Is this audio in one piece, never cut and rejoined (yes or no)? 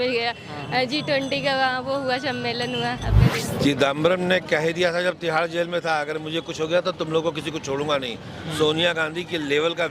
no